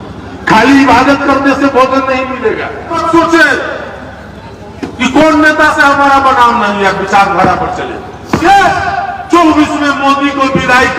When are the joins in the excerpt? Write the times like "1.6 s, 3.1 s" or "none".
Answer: 3.0 s, 8.4 s